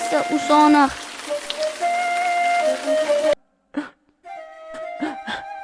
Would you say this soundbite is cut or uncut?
cut